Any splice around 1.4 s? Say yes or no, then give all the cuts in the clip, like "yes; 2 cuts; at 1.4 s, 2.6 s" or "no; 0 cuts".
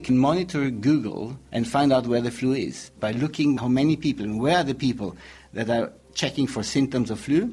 yes; 2 cuts; at 1.4 s, 2.9 s